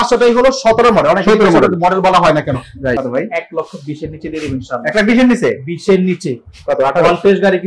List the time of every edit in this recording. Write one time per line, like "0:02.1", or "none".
0:03.0